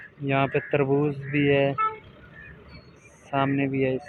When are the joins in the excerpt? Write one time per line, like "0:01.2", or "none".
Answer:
none

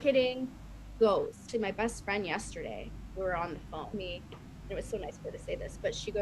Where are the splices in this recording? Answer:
0:01.4
0:03.9

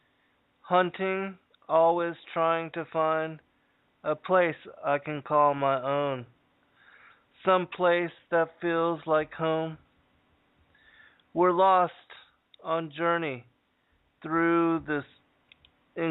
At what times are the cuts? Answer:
none

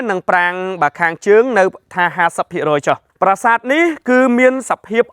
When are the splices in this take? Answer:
0:03.0

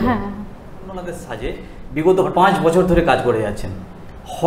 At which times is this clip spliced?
0:01.2

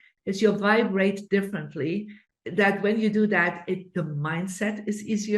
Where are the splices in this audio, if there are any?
0:02.2

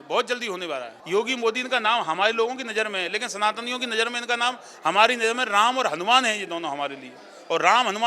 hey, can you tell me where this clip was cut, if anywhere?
0:00.9

